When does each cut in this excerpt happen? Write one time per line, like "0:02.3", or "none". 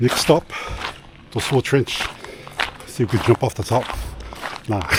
none